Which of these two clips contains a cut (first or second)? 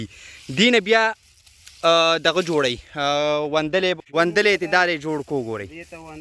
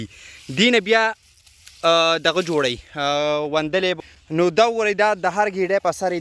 first